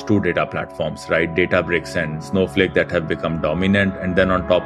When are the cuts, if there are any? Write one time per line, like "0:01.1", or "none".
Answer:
0:02.2